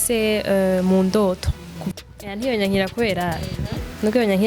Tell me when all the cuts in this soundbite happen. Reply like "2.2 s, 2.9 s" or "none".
1.9 s